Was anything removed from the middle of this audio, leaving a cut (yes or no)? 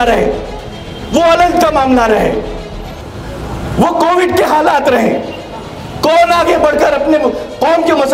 no